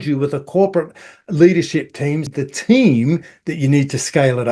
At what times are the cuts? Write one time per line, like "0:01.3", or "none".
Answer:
0:02.3